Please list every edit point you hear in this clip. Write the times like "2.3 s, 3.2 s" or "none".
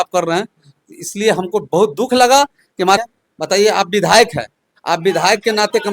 3.0 s